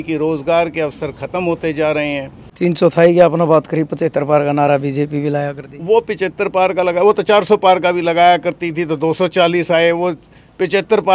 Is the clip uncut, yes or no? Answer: no